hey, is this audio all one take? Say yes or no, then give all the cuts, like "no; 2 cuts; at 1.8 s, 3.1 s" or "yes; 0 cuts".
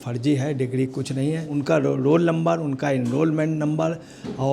no; 1 cut; at 1.5 s